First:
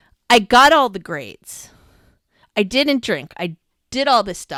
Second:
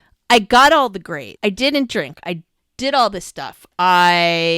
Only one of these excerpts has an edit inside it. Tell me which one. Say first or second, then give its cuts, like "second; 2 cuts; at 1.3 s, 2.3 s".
second; 1 cut; at 1.2 s